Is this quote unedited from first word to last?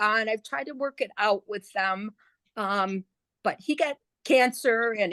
yes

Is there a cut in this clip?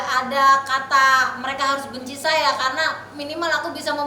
no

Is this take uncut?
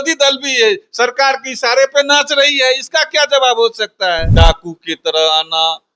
no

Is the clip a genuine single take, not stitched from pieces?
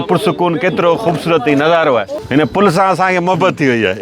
no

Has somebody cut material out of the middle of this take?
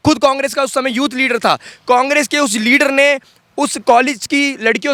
no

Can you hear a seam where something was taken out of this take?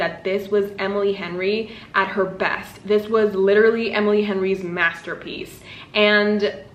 no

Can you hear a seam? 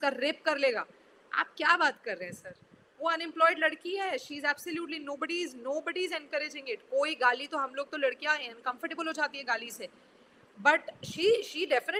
no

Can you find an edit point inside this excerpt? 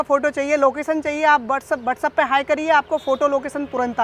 no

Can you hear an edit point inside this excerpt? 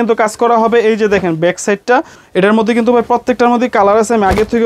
yes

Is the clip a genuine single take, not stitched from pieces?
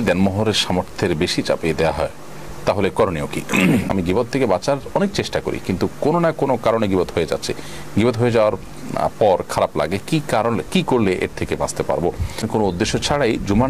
no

